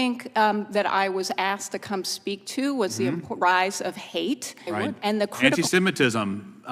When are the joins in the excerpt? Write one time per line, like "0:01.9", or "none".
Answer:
0:05.6